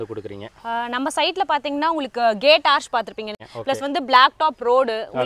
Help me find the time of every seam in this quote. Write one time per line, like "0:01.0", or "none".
0:03.4

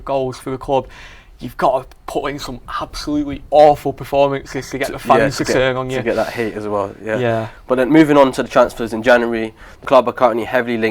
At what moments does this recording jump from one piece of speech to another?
none

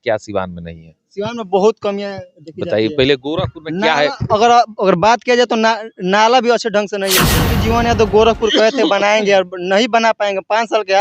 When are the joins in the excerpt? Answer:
0:07.5

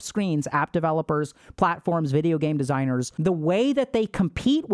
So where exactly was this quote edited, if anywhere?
0:03.1

